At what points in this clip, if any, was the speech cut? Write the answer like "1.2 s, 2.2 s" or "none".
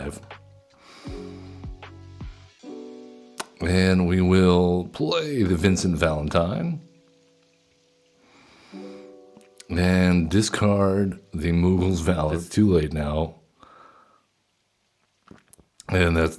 12.4 s